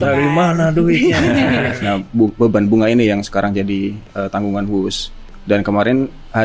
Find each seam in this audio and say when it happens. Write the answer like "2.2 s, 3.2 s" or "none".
1.8 s